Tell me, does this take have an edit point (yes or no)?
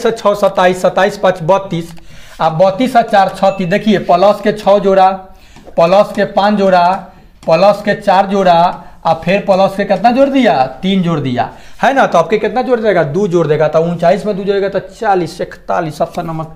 no